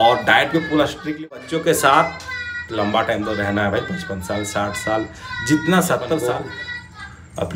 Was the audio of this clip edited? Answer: yes; 2 cuts; at 1.3 s, 6.2 s

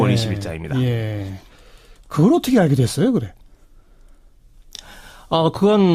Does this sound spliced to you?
no; 0 cuts

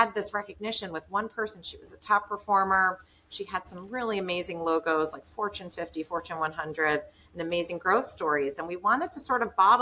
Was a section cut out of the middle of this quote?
no; 0 cuts

